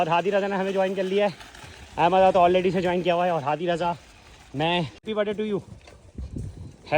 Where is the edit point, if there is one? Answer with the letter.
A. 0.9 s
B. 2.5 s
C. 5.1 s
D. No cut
C